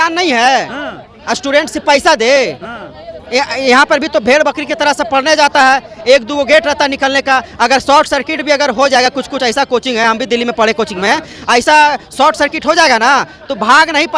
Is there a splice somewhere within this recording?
no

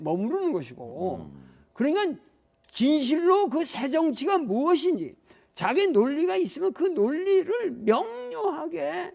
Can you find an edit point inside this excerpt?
yes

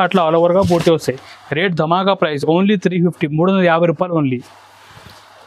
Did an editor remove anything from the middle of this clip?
no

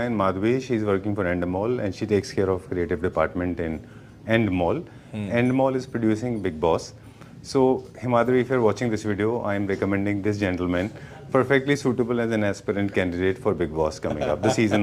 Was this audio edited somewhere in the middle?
no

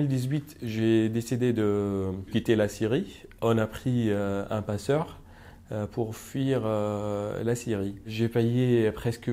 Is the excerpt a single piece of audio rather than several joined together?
no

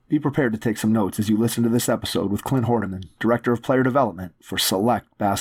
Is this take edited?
no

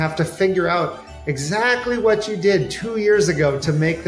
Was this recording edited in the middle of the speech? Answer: no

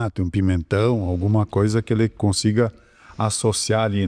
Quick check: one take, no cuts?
yes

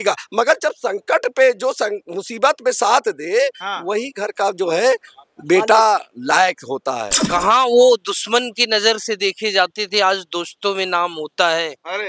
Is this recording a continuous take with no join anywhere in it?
no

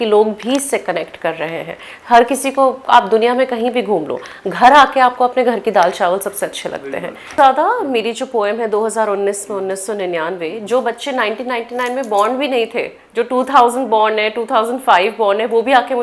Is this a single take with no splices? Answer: no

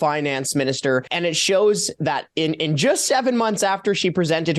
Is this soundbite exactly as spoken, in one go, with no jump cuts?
no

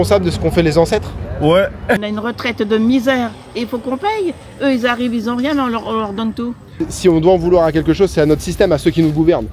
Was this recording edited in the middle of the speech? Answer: yes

